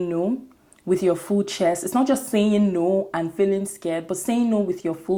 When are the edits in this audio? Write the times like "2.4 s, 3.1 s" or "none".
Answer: none

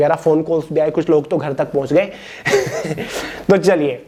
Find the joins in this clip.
none

